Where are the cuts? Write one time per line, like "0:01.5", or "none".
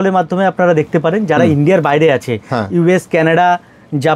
none